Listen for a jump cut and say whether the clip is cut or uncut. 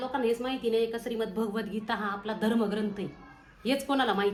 uncut